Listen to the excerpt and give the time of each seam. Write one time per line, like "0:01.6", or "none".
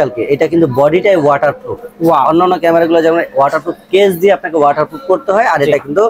none

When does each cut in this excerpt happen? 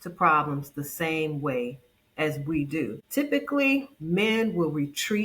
0:03.0

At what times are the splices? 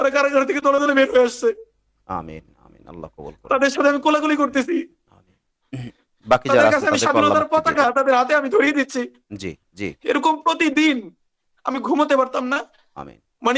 none

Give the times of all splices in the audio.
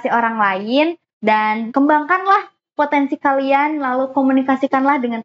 0:01.7

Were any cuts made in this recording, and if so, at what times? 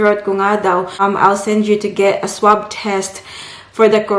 0:01.0

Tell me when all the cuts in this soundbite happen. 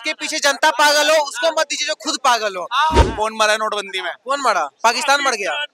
0:03.0

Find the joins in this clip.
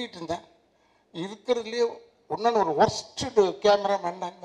none

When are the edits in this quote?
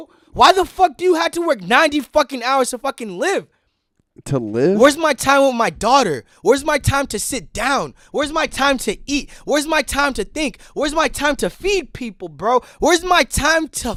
none

